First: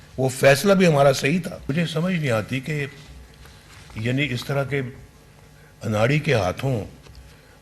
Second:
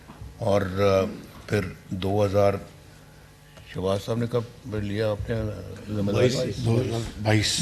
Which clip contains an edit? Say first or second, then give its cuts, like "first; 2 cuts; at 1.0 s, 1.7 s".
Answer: first; 1 cut; at 1.7 s